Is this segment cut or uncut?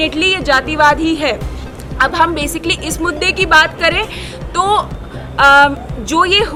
uncut